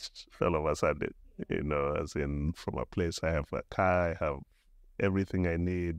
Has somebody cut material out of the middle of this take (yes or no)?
no